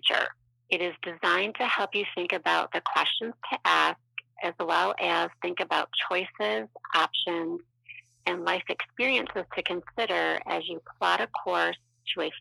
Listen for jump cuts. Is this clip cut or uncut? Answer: uncut